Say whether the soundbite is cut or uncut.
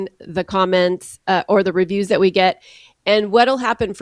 uncut